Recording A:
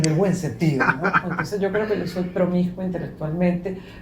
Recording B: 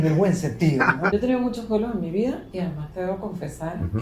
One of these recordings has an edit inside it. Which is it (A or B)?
B